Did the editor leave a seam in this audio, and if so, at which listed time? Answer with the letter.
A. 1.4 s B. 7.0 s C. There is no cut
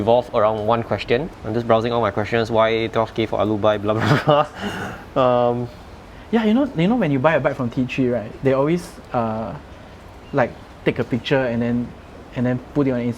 A